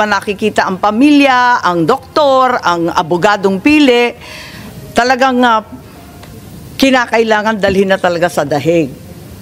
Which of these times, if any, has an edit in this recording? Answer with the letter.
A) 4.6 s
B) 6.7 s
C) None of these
C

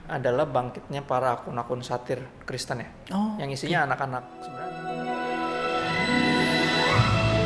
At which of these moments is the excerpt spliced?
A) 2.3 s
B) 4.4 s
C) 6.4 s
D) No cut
B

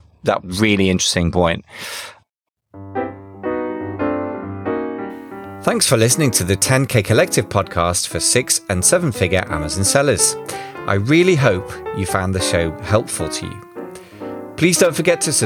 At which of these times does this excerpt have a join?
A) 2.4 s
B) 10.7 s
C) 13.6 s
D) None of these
A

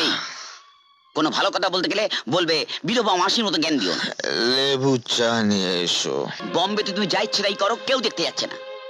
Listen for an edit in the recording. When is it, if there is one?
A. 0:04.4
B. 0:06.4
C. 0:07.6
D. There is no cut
B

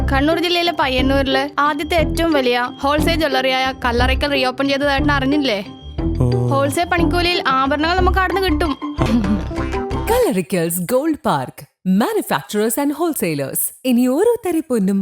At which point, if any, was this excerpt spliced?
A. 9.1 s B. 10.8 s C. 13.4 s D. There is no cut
A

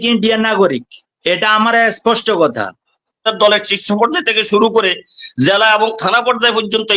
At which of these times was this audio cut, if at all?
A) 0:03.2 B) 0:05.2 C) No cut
A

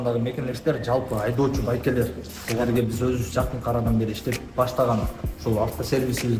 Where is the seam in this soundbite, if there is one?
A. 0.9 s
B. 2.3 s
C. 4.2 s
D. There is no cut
D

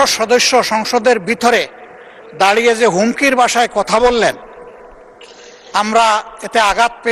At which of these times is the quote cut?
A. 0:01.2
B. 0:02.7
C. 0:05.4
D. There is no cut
D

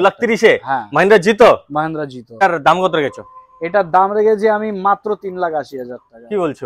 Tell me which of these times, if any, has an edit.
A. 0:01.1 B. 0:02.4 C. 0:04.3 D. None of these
B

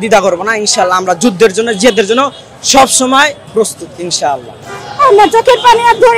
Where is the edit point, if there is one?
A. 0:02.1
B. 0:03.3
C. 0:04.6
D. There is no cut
C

